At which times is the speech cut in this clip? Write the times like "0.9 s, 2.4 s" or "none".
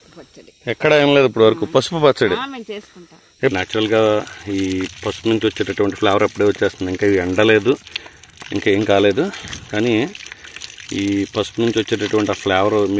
3.5 s

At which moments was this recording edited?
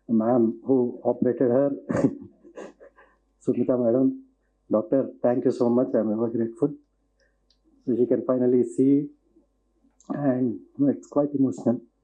none

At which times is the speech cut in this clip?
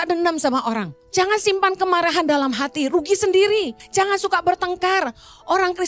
0.9 s, 3.8 s

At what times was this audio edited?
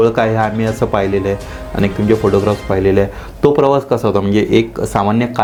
none

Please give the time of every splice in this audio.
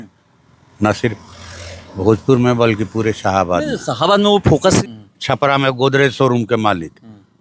4.8 s

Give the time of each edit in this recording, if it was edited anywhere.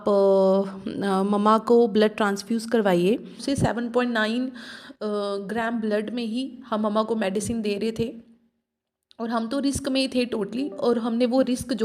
3.4 s

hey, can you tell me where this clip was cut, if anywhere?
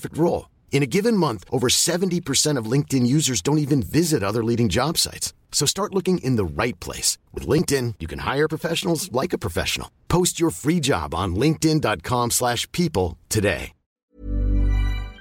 14.2 s

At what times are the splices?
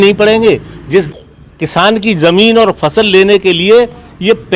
1.1 s

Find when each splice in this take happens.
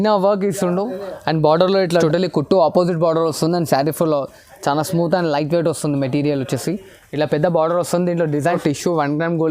2.0 s, 8.6 s

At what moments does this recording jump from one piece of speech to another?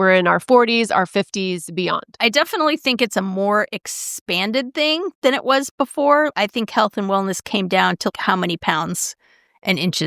2.2 s, 6.3 s, 8.1 s

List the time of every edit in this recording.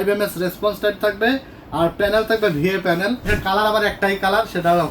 3.3 s

